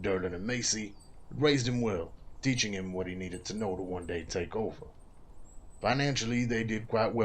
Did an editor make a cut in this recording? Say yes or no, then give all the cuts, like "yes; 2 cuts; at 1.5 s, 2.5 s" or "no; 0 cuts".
no; 0 cuts